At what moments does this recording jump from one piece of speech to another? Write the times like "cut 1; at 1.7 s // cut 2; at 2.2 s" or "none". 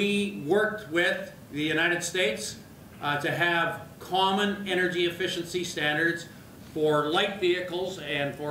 none

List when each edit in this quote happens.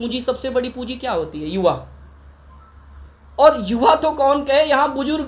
none

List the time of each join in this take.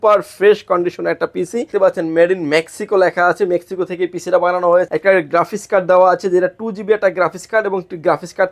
cut 1; at 1.7 s // cut 2; at 4.9 s

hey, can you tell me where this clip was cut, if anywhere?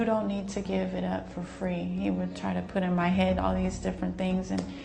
none

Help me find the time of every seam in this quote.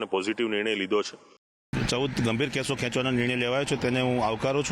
cut 1; at 1.5 s

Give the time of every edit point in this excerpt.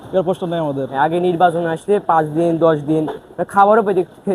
cut 1; at 0.9 s

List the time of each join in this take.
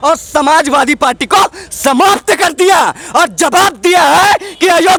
none

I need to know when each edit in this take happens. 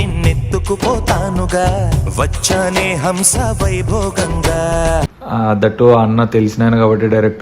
cut 1; at 5.2 s

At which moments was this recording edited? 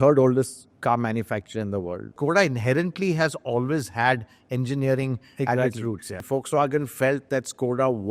cut 1; at 2.1 s // cut 2; at 6.2 s

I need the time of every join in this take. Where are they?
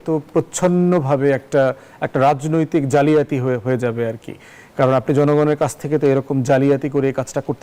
none

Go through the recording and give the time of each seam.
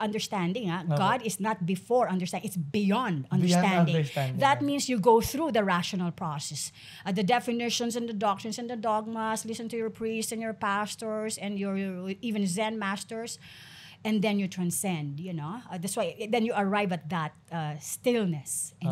none

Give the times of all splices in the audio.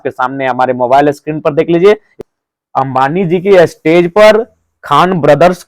cut 1; at 2.2 s

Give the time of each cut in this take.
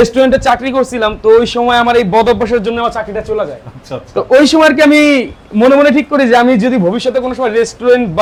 none

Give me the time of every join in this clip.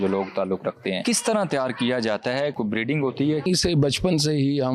cut 1; at 1.0 s // cut 2; at 2.5 s // cut 3; at 3.5 s

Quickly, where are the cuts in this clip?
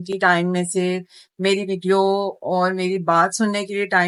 none

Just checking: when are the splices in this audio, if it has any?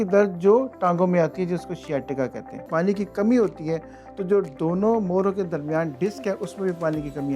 cut 1; at 2.6 s

